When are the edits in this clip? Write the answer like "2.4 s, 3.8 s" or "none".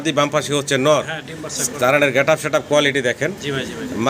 none